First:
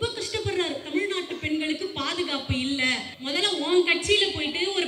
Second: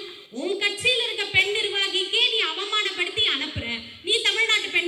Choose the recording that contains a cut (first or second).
first